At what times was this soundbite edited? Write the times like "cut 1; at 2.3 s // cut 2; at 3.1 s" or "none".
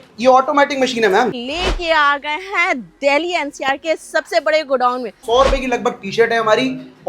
cut 1; at 1.4 s // cut 2; at 5.2 s